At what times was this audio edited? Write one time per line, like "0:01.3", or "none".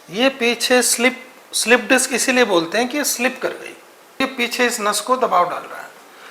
0:04.2